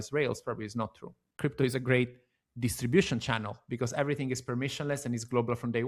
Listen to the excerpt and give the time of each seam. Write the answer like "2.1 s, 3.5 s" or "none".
1.3 s